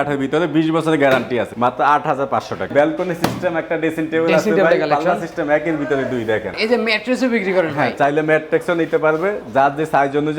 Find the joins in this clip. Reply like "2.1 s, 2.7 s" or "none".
1.5 s, 2.7 s, 6.5 s